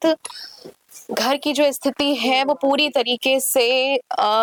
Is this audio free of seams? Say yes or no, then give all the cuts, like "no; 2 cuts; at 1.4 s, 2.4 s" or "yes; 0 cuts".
yes; 0 cuts